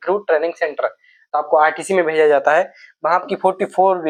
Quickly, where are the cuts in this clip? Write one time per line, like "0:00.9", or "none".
none